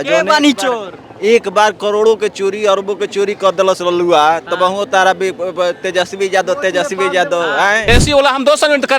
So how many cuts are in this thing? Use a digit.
1